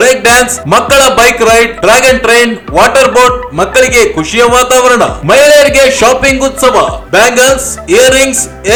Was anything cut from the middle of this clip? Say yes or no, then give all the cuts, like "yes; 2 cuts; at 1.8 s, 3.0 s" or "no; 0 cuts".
no; 0 cuts